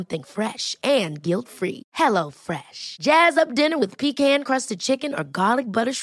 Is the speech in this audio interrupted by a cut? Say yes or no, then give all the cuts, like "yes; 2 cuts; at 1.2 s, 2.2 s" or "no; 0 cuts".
no; 0 cuts